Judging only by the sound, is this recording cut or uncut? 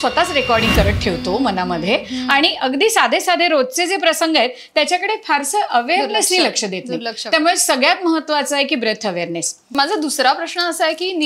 cut